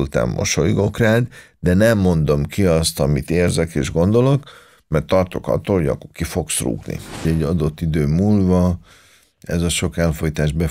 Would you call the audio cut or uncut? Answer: cut